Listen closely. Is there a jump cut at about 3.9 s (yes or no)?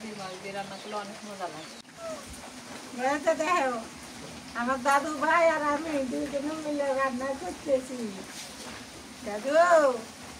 no